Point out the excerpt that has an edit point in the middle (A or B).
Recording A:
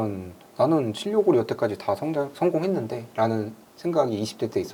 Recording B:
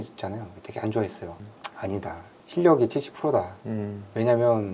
B